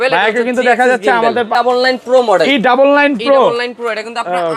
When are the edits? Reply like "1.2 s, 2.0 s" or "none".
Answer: 1.6 s

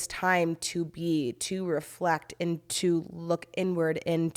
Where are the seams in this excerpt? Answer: none

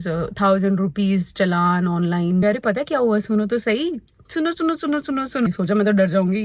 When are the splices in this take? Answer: 2.4 s, 5.5 s

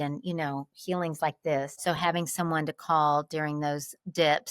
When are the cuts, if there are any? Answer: 1.8 s

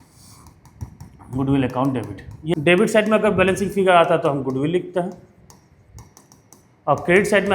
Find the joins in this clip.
2.5 s

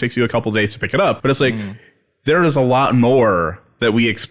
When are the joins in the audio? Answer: 1.2 s

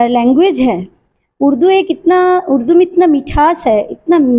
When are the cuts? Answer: none

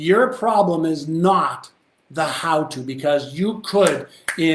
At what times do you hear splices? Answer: none

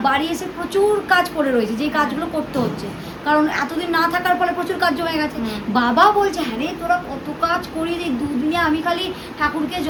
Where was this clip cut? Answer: none

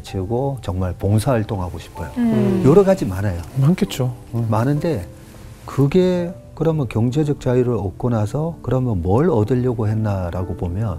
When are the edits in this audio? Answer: none

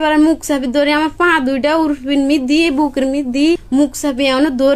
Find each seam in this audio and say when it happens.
3.6 s

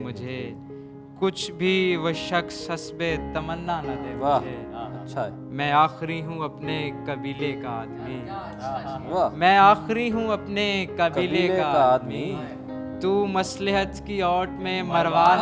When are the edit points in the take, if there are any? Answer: none

